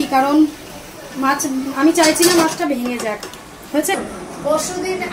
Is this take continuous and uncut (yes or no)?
no